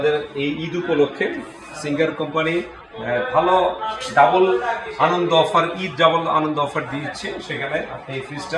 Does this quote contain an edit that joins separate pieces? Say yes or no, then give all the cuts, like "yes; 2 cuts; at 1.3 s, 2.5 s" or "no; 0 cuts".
no; 0 cuts